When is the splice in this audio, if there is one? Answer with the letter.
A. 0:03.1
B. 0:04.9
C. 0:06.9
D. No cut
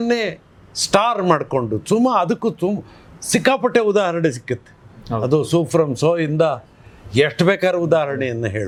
D